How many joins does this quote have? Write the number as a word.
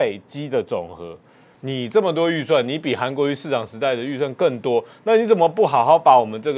one